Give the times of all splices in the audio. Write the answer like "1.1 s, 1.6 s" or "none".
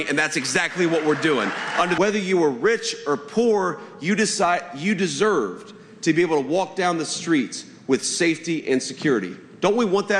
2.0 s